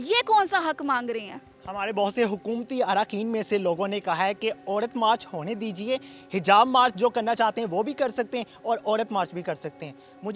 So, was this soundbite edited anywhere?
no; 0 cuts

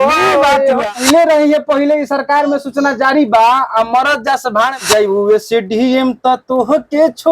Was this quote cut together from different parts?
yes; 2 cuts; at 1.0 s, 4.8 s

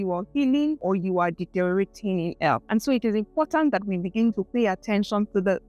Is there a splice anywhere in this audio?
yes; 2 cuts; at 0.8 s, 2.6 s

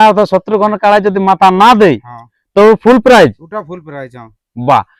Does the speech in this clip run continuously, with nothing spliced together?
yes; 0 cuts

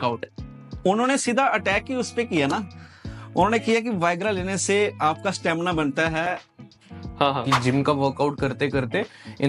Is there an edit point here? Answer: yes; 1 cut; at 7.6 s

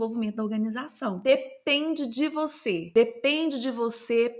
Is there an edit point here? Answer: yes; 1 cut; at 1.2 s

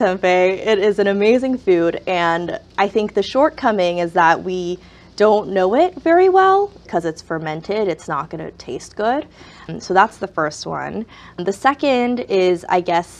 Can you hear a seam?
yes; 3 cuts; at 6.8 s, 9.7 s, 11.4 s

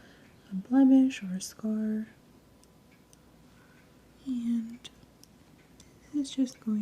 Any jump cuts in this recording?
yes; 1 cut; at 2.2 s

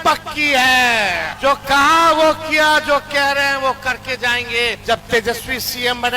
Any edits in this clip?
yes; 2 cuts; at 1.3 s, 4.8 s

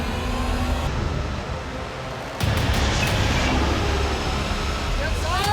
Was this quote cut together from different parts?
no; 0 cuts

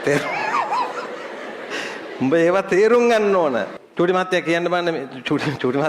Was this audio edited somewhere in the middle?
yes; 1 cut; at 3.8 s

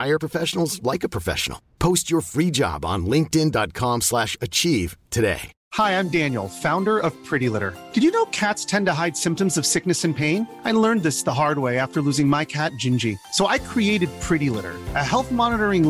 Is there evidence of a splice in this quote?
no; 0 cuts

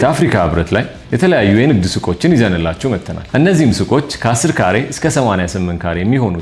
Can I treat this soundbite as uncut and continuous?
no; 2 cuts; at 1.0 s, 3.1 s

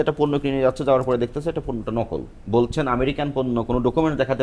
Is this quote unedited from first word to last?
no; 1 cut; at 2.4 s

